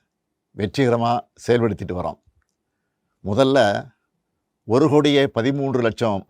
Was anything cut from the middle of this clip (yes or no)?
no